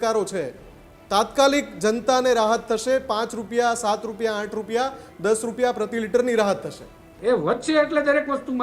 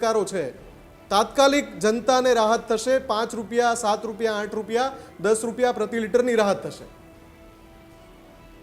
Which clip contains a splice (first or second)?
first